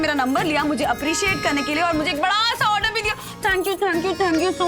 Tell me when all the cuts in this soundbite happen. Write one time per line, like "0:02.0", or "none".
none